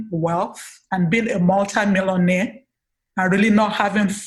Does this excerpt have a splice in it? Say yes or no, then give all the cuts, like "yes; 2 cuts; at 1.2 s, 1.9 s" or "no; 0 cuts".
no; 0 cuts